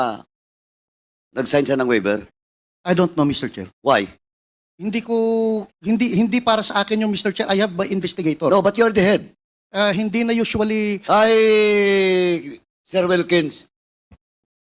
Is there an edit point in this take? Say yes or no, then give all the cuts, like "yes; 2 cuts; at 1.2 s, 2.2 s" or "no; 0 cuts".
no; 0 cuts